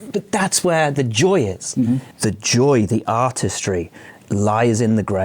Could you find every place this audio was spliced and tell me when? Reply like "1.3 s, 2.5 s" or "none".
2.1 s